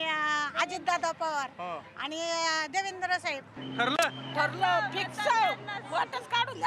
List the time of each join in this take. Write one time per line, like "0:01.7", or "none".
0:03.5